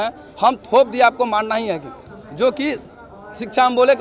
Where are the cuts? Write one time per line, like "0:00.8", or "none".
none

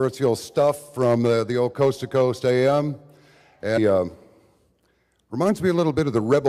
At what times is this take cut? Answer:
none

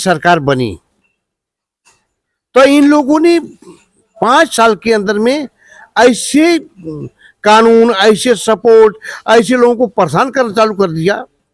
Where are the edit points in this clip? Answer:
none

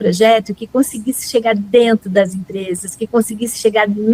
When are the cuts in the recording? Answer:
none

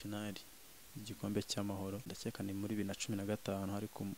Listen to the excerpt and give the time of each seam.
0:02.1

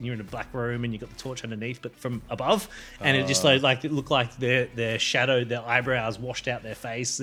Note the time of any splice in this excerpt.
none

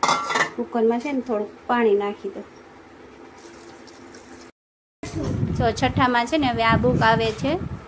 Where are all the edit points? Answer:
0:04.9

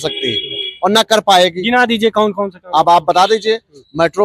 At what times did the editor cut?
none

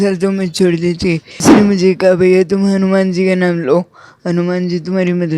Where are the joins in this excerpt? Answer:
0:01.5

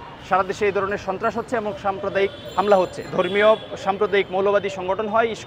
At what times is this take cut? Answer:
0:03.0

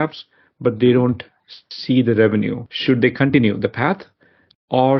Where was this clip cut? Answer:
0:02.7

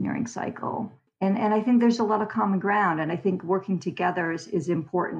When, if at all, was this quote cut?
none

